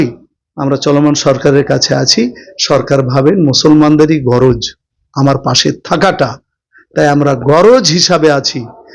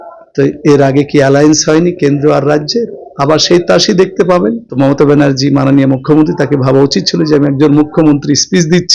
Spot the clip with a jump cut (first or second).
second